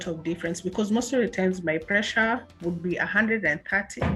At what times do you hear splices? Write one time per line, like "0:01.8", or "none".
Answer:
none